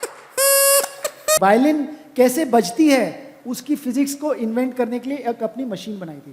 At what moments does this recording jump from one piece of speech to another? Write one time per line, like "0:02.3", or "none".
0:01.4